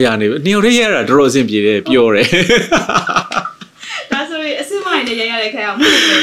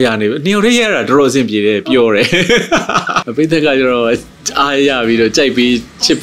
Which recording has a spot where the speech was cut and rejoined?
second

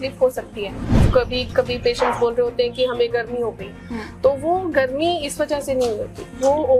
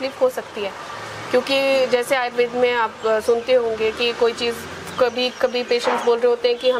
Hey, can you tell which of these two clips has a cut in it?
first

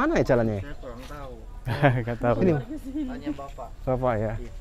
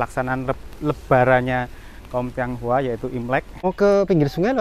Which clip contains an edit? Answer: second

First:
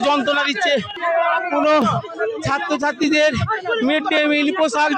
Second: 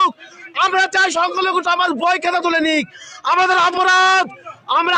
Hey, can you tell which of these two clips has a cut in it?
first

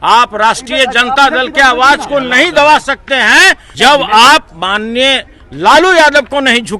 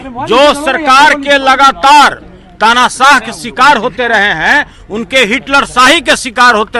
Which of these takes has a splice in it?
first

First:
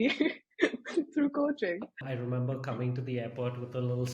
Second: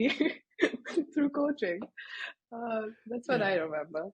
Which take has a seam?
first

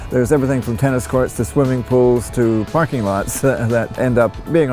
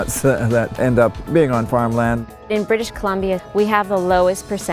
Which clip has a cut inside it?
second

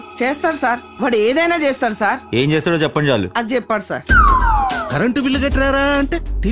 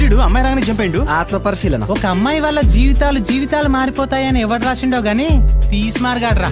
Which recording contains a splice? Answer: first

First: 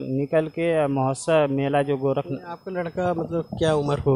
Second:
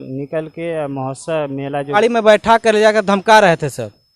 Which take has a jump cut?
second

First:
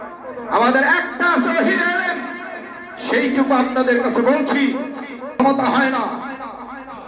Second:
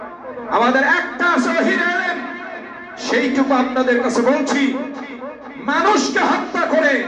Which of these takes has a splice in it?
first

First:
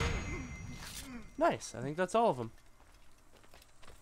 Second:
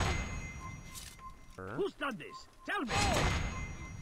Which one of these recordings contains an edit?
second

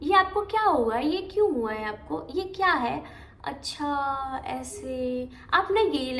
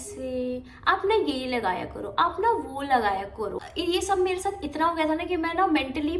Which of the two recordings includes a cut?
second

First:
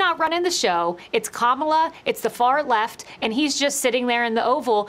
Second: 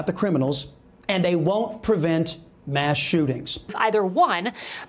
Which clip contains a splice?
second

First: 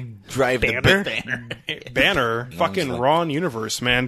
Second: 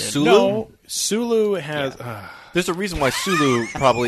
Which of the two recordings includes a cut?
first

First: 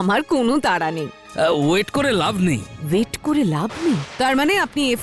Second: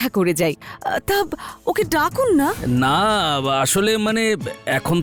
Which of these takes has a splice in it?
first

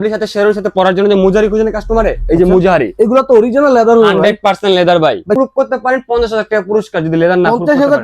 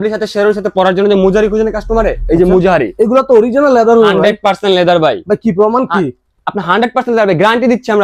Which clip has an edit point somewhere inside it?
first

